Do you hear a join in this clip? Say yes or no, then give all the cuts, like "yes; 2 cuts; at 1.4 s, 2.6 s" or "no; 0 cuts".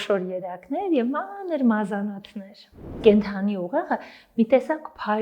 yes; 1 cut; at 2.9 s